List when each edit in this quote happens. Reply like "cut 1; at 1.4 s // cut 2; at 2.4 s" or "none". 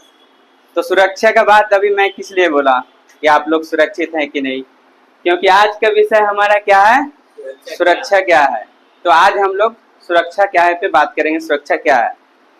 none